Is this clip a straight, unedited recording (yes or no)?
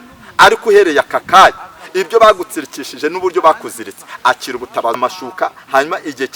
no